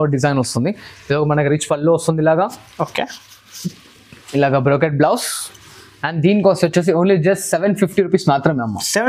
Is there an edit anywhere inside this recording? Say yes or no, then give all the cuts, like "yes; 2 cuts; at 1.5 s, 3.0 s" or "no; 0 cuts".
no; 0 cuts